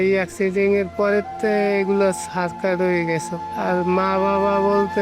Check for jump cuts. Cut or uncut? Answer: uncut